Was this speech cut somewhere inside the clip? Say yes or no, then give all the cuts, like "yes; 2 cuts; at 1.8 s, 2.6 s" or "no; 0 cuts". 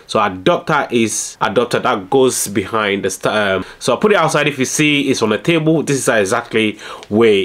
yes; 1 cut; at 3.7 s